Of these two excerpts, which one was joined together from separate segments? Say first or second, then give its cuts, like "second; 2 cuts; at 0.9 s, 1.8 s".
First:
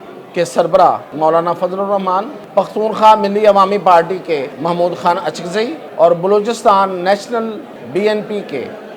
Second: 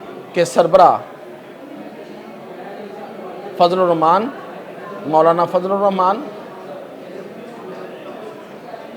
first; 5 cuts; at 1.1 s, 2.4 s, 4.5 s, 5.8 s, 7.7 s